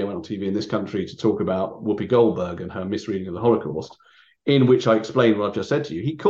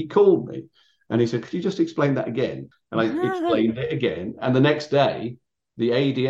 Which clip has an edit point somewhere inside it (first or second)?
second